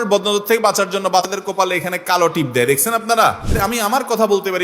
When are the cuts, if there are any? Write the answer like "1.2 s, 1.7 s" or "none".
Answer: 1.3 s, 3.6 s